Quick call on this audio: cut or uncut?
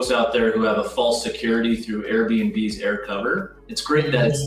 uncut